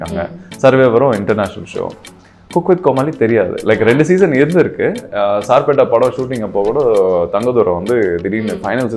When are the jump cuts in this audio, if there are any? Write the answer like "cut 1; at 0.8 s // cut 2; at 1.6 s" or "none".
none